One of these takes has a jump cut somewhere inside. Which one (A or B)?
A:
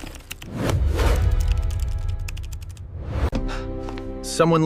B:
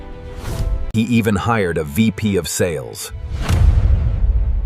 B